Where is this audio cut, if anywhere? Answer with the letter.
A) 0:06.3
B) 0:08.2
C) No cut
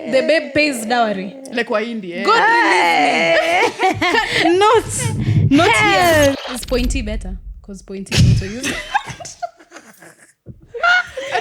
A